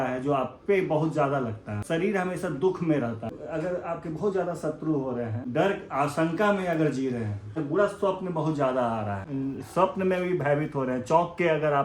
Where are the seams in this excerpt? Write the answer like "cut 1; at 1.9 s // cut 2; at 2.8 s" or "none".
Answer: cut 1; at 1.8 s // cut 2; at 3.3 s // cut 3; at 5.4 s // cut 4; at 7.5 s // cut 5; at 9.2 s